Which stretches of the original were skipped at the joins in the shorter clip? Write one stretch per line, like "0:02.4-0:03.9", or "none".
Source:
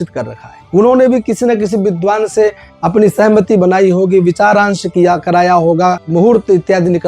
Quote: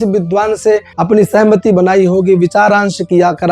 0:02.6-0:02.8